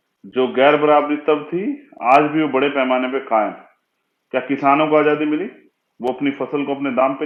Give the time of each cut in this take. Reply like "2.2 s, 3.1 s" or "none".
none